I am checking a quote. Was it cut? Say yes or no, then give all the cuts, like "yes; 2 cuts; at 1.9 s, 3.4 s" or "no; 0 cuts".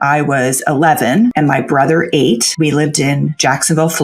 yes; 2 cuts; at 1.3 s, 2.5 s